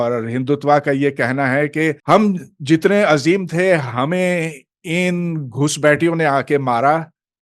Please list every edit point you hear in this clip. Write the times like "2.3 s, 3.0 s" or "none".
2.0 s